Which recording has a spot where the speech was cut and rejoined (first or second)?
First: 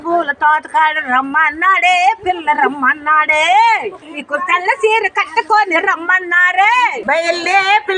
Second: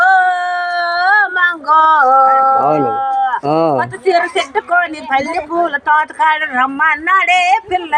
first